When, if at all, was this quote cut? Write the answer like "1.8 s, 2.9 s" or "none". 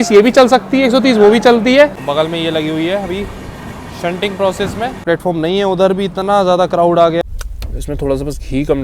2.0 s, 5.0 s, 7.2 s